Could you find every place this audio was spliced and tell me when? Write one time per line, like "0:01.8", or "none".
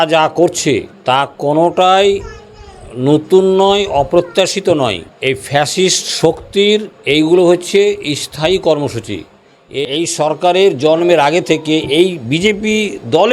0:09.7

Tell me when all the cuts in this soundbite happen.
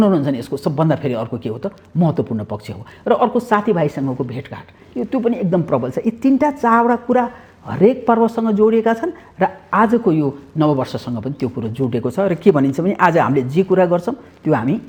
none

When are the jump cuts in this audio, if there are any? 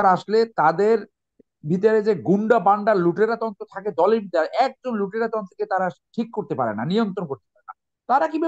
none

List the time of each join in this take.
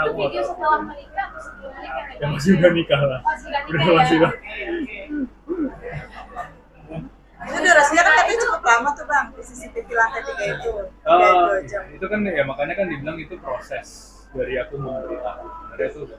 none

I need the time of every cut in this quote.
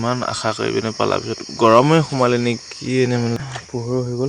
0:03.4

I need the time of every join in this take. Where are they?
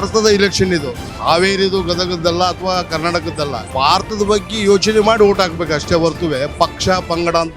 0:01.0
0:03.7

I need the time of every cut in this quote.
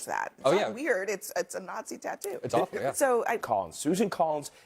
0:03.4

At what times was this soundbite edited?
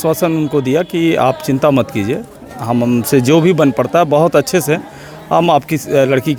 none

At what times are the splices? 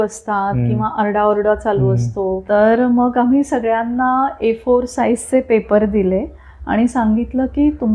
0:02.4

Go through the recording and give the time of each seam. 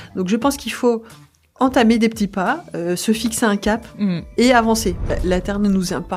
0:01.4
0:05.1

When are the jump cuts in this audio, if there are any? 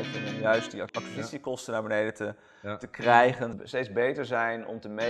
0:00.9
0:03.5

